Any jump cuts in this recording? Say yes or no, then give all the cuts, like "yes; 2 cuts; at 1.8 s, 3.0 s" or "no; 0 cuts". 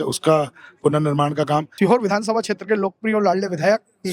yes; 1 cut; at 1.7 s